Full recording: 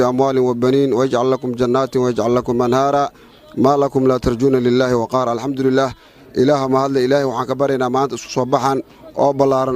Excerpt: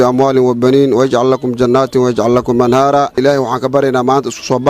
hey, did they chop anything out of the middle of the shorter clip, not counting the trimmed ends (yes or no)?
yes